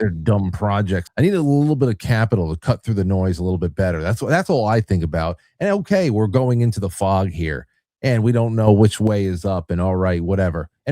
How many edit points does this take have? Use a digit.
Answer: 1